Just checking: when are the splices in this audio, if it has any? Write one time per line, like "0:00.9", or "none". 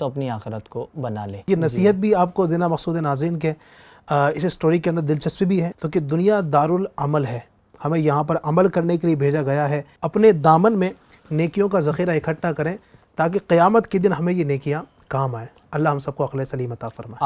0:01.4
0:05.7
0:09.9
0:15.6